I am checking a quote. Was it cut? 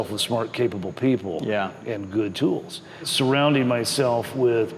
yes; 2 cuts; at 1.8 s, 3.0 s

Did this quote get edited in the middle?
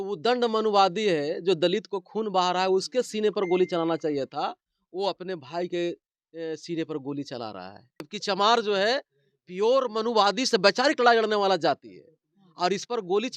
yes; 1 cut; at 8.1 s

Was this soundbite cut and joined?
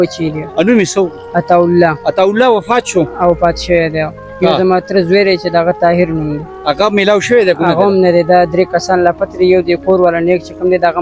no; 0 cuts

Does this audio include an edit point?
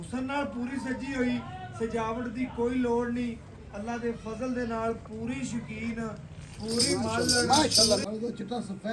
yes; 1 cut; at 8.0 s

